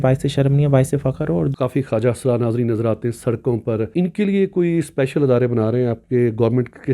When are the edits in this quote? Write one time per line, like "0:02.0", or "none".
0:01.5
0:03.9